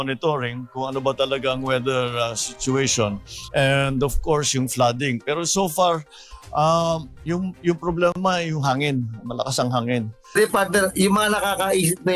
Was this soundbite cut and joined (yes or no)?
yes